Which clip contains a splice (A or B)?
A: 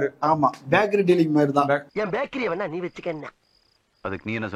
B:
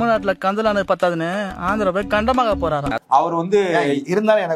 B